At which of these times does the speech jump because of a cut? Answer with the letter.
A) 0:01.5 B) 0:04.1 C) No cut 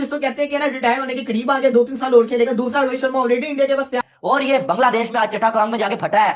B